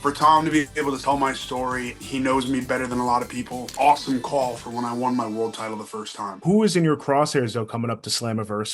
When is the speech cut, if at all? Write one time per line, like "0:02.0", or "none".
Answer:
0:01.0
0:02.0
0:03.7
0:06.4